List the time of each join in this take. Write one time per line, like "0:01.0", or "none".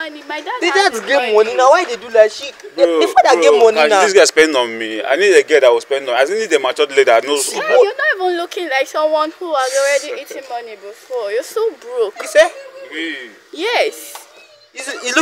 none